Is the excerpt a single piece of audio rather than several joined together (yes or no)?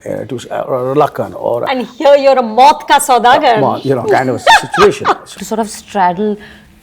no